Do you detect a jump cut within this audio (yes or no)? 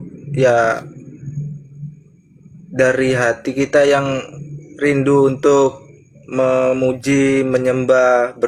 no